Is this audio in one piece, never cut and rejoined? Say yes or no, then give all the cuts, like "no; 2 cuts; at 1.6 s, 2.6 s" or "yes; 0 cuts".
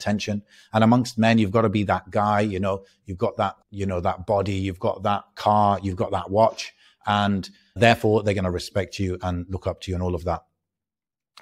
no; 2 cuts; at 3.6 s, 7.8 s